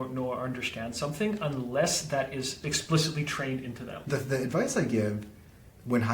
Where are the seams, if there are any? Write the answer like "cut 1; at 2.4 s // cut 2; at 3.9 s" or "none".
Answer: cut 1; at 2.6 s // cut 2; at 4.1 s